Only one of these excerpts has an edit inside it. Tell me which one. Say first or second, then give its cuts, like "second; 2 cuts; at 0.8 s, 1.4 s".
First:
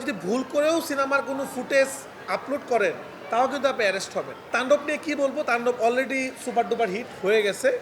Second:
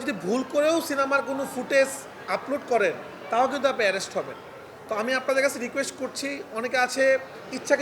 first; 1 cut; at 4.5 s